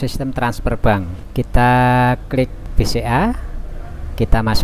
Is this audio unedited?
no; 2 cuts; at 1.2 s, 2.6 s

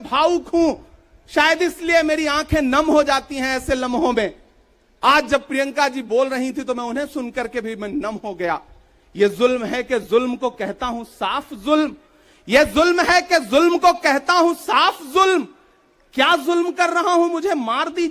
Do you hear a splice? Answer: no; 0 cuts

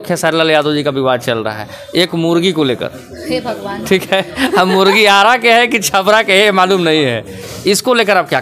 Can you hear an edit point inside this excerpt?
no; 0 cuts

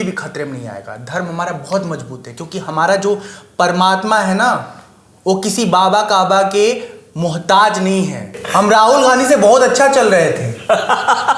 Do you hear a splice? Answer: yes; 1 cut; at 8.4 s

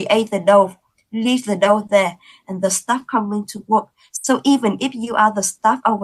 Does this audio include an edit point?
no; 0 cuts

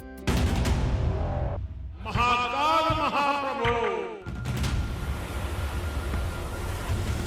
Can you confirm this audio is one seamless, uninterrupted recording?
no; 1 cut; at 3.9 s

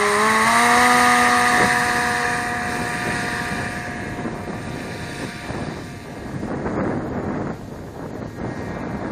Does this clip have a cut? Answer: no; 0 cuts

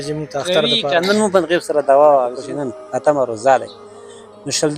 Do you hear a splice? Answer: yes; 1 cut; at 2.4 s

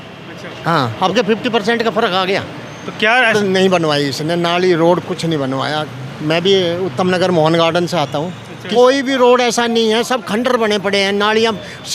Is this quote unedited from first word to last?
no; 2 cuts; at 3.3 s, 8.6 s

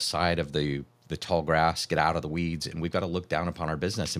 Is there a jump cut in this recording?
no; 0 cuts

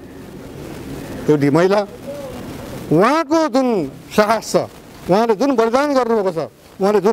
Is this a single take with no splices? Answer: yes; 0 cuts

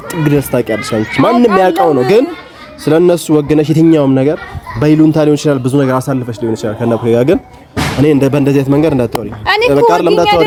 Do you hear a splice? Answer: no; 0 cuts

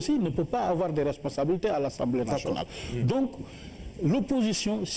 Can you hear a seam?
yes; 1 cut; at 0.9 s

